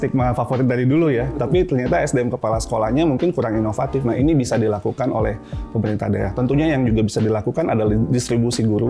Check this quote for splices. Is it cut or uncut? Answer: uncut